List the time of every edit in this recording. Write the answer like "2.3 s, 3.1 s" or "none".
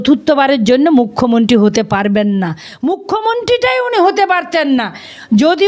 2.6 s